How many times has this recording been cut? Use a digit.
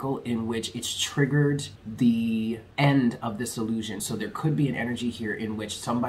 3